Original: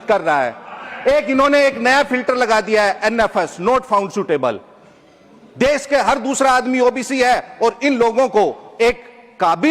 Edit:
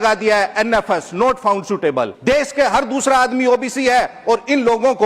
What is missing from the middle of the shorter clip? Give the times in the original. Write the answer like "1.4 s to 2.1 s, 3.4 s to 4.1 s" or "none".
4.6 s to 5.5 s